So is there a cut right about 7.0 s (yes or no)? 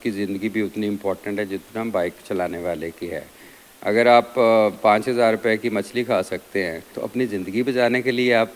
yes